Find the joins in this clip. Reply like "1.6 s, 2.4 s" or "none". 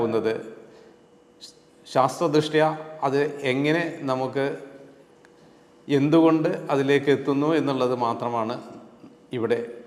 none